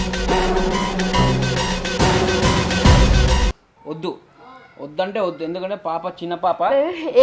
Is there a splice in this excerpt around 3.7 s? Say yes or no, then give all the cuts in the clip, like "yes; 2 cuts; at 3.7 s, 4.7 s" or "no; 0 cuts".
yes; 1 cut; at 3.7 s